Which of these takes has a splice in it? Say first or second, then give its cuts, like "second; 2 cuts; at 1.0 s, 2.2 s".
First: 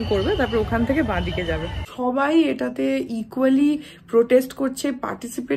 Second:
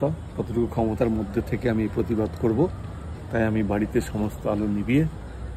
first; 1 cut; at 1.9 s